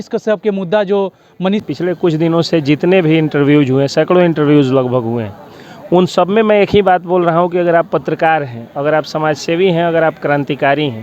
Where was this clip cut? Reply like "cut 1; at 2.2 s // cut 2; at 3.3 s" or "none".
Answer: cut 1; at 1.6 s